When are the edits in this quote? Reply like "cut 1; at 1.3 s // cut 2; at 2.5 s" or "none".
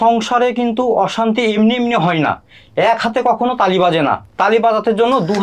none